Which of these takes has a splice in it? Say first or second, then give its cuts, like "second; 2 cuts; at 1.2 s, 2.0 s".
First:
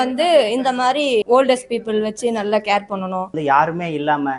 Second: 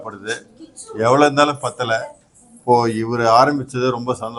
first; 2 cuts; at 1.2 s, 3.4 s